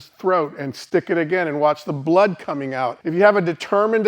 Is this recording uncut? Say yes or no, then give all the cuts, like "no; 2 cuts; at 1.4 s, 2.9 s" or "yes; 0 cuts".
no; 1 cut; at 3.0 s